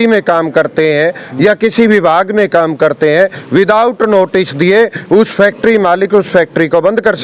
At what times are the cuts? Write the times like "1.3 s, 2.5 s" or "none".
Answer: none